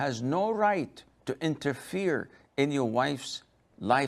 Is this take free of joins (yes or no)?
yes